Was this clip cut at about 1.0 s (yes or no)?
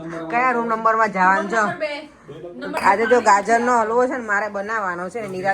no